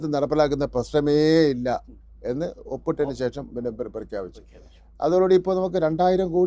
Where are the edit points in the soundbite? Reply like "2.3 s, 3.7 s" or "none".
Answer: none